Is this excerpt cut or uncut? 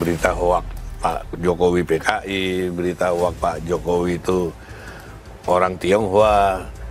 uncut